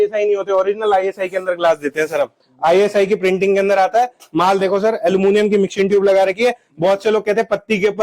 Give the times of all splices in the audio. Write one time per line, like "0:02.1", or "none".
none